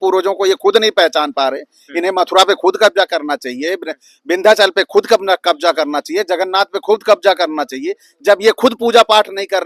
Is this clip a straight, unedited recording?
yes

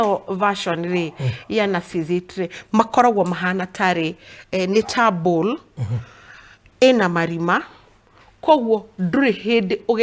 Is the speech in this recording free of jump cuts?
yes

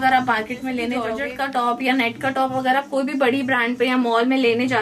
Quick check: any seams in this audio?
no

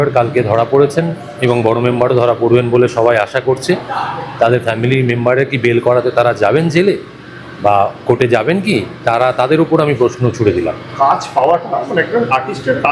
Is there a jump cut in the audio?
no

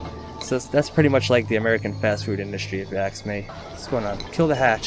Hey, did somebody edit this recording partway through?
yes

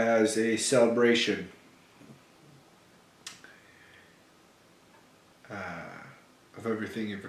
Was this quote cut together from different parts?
no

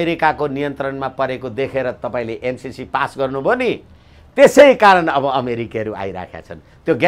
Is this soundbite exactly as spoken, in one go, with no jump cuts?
yes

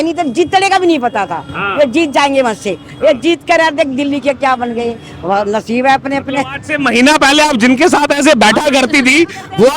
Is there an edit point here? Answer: no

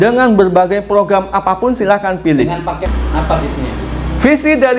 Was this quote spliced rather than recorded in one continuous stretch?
yes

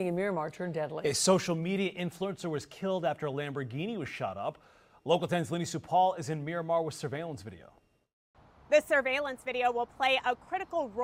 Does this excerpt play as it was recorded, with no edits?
yes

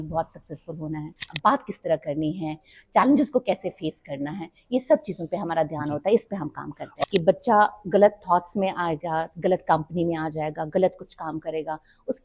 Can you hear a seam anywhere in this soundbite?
yes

